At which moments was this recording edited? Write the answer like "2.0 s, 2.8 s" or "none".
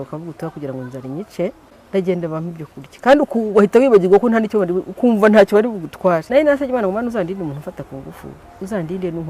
1.7 s, 6.3 s